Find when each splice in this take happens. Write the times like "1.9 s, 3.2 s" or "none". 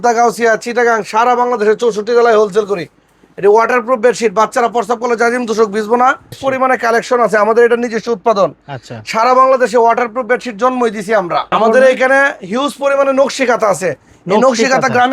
6.3 s, 11.5 s